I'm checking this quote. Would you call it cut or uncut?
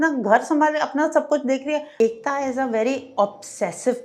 cut